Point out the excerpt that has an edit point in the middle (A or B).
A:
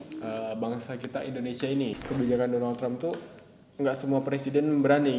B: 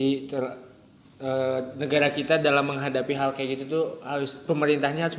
A